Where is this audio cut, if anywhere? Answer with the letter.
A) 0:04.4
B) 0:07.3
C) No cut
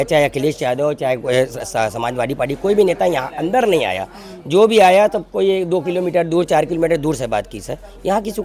C